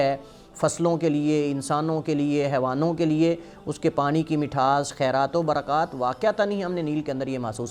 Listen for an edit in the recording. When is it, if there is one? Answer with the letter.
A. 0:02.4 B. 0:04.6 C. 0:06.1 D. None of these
D